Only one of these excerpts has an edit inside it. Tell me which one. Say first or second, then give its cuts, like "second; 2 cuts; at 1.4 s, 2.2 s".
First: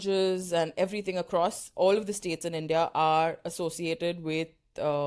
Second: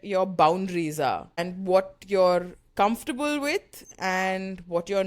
second; 1 cut; at 1.5 s